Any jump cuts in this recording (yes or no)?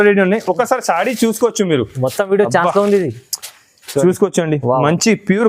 no